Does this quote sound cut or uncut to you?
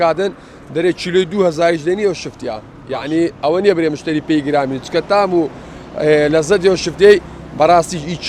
uncut